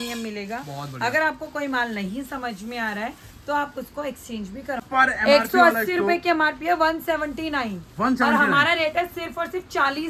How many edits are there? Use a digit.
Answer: 1